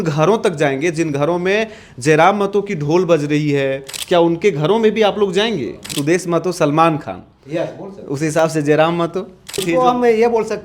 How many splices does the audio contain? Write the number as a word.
three